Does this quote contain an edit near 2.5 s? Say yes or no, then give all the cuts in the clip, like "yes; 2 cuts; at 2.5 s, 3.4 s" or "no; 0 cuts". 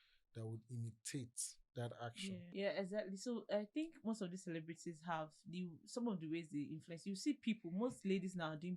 yes; 1 cut; at 2.5 s